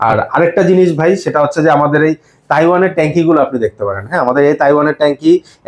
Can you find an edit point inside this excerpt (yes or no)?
no